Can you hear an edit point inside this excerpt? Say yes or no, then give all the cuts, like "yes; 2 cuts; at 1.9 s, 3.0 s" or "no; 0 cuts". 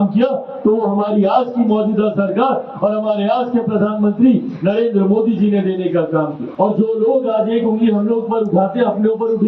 yes; 1 cut; at 6.4 s